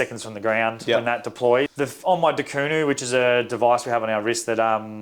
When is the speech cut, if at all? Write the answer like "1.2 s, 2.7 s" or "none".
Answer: 1.7 s